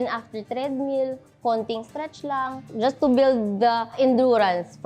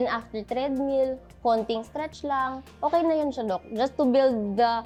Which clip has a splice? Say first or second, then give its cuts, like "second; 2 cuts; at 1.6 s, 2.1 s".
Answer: first; 2 cuts; at 2.7 s, 4.0 s